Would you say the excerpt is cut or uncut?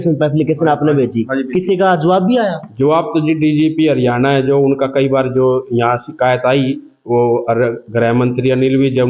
uncut